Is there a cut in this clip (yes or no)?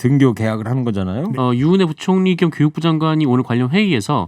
yes